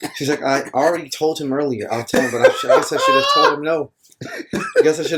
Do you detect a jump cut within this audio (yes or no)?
no